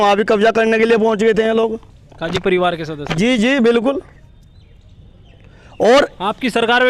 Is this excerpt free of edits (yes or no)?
yes